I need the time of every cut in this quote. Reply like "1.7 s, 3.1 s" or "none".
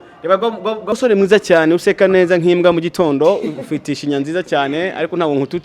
0.9 s